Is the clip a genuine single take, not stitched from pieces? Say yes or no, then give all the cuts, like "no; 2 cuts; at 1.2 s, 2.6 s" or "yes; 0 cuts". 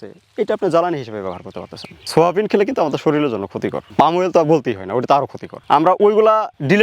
no; 2 cuts; at 2.0 s, 5.5 s